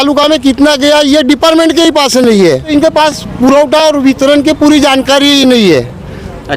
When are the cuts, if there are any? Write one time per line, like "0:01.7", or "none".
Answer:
0:02.7